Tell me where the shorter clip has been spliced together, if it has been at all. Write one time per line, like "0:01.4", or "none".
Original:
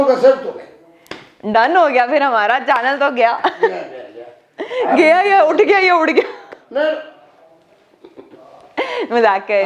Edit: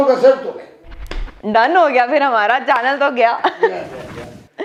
none